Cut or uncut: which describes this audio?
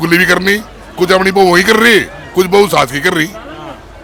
uncut